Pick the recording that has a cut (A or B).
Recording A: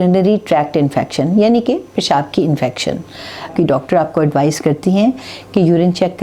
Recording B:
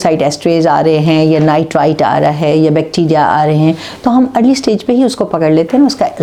A